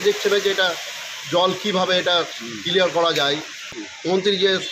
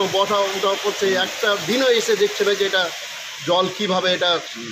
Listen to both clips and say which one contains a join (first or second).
first